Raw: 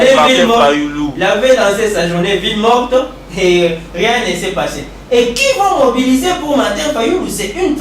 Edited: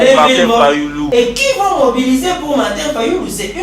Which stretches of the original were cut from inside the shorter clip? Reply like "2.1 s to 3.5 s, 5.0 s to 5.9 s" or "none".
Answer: 1.0 s to 5.0 s